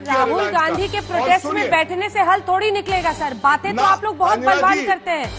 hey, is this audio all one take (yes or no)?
yes